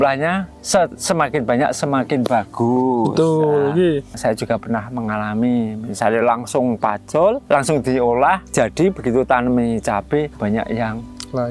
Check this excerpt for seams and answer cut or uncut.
cut